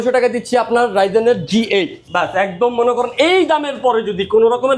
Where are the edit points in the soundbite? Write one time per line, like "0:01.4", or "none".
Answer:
none